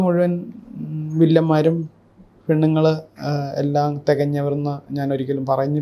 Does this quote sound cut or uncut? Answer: uncut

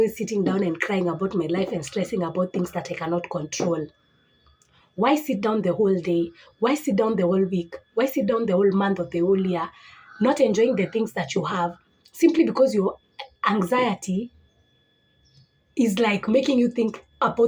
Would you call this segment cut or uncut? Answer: uncut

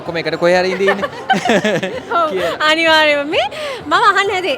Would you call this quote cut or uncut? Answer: uncut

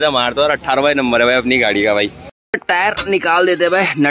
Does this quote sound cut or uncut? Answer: cut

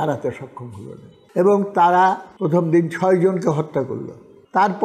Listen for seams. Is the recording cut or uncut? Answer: uncut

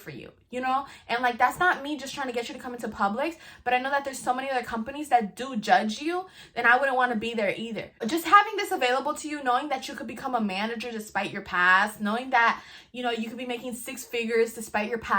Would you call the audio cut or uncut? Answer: cut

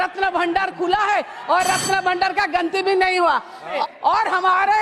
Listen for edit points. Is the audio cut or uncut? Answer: cut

